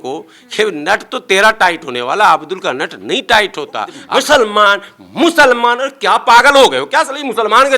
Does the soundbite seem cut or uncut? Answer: cut